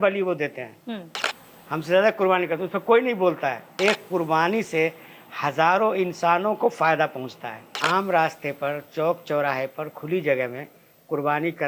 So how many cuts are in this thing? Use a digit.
2